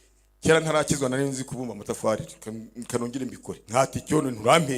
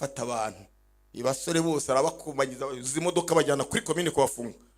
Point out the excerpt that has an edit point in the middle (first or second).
first